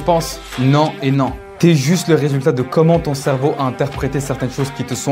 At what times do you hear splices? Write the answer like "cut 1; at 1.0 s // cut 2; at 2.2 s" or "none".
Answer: none